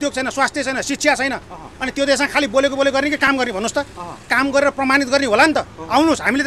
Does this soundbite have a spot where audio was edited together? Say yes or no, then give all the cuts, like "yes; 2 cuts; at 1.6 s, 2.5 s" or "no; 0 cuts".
no; 0 cuts